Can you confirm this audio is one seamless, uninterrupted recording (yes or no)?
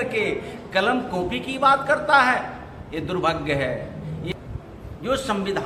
no